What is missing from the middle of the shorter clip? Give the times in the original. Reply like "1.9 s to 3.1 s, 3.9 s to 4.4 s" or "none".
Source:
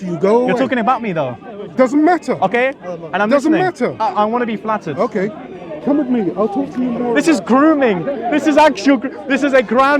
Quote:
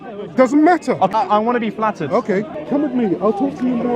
2.5 s to 4.0 s, 5.4 s to 5.7 s